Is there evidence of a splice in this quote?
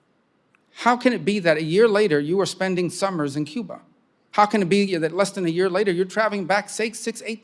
no; 0 cuts

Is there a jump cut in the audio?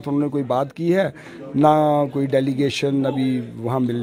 no; 0 cuts

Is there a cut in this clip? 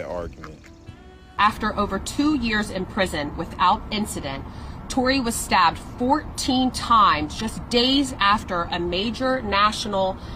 yes; 1 cut; at 1.2 s

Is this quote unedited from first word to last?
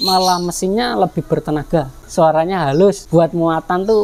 no; 2 cuts; at 2.0 s, 3.0 s

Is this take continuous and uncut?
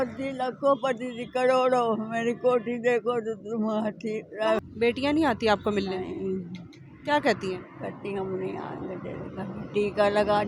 no; 1 cut; at 4.6 s

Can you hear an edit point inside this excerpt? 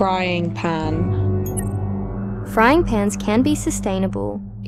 no; 0 cuts

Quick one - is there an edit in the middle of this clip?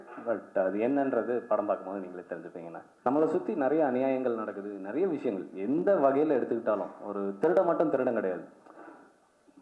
yes; 1 cut; at 2.8 s

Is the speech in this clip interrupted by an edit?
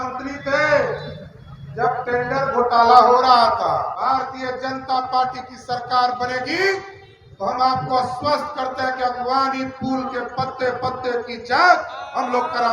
yes; 1 cut; at 4.0 s

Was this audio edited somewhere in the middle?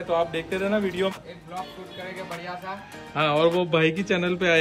yes; 1 cut; at 1.1 s

